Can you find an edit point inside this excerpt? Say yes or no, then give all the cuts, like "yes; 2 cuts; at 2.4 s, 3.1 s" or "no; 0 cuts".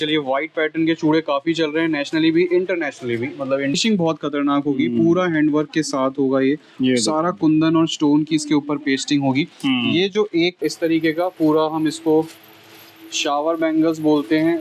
yes; 2 cuts; at 3.8 s, 10.6 s